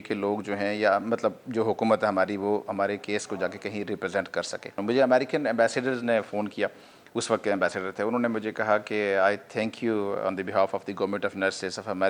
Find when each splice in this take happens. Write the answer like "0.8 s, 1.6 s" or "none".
4.6 s